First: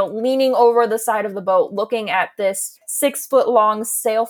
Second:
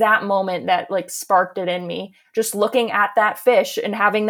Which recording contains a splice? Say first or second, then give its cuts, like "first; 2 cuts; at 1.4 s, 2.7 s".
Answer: first; 1 cut; at 2.7 s